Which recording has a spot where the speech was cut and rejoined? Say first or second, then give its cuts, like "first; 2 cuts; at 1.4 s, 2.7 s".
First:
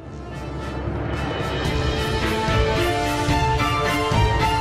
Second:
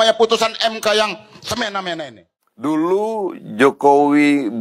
second; 1 cut; at 2.4 s